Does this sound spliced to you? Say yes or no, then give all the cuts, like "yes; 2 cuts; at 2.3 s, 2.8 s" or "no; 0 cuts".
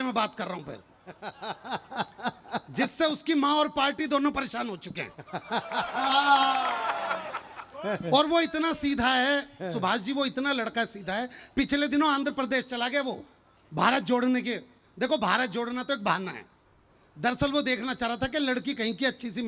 no; 0 cuts